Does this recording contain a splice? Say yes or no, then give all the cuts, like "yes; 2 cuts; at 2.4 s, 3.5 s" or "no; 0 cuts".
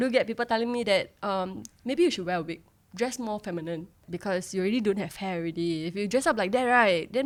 no; 0 cuts